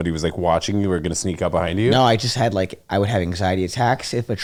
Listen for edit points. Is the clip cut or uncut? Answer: uncut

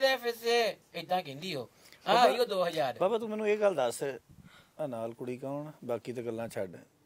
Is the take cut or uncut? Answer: uncut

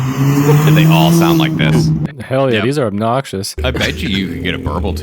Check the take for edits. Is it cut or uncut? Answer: cut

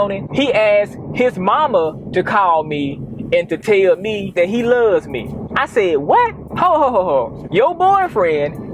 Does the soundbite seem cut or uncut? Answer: uncut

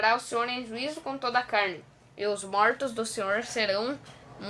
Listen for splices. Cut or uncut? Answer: uncut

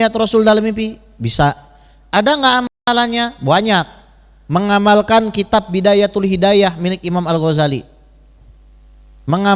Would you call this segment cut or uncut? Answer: uncut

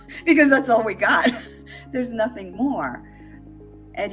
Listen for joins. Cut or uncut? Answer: uncut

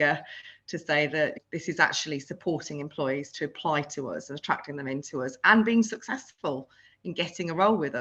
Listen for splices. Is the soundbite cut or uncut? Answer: uncut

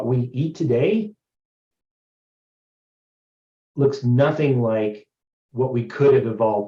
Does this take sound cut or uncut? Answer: uncut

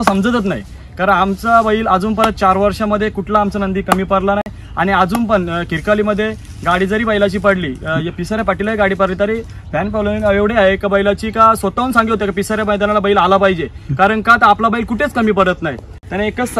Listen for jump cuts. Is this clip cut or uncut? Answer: uncut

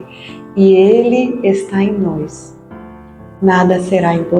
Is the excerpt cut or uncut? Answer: uncut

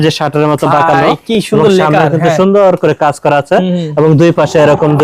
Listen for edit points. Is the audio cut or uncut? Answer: uncut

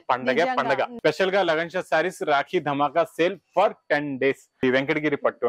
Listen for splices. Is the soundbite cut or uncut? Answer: cut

